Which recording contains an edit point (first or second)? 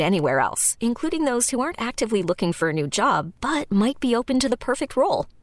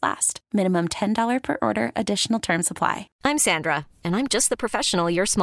second